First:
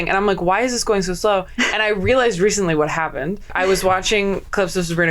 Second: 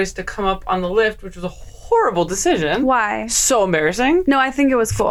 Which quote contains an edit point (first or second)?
first